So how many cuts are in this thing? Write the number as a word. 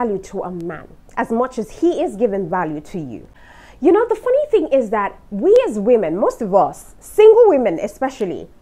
one